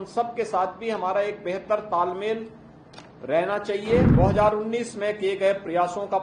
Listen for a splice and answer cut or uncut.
cut